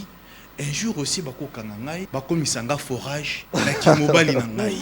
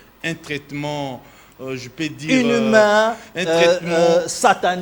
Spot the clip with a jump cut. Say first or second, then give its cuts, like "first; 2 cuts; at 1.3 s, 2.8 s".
first; 2 cuts; at 2.1 s, 3.3 s